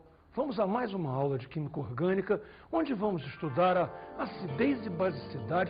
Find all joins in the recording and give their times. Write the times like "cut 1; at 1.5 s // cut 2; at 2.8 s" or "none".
none